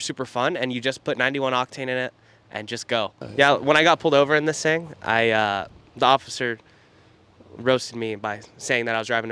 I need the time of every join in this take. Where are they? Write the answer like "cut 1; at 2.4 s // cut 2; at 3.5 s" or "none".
none